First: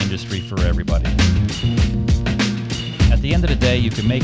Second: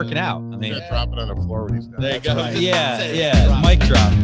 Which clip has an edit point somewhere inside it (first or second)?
second